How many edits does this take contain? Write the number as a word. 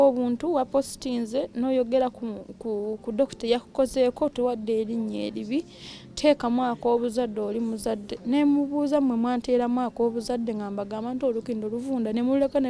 zero